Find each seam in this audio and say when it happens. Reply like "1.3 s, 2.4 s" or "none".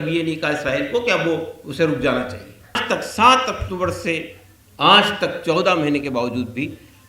2.8 s